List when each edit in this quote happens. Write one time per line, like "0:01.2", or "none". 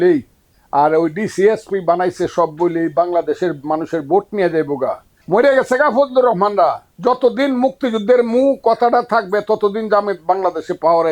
0:05.1
0:06.9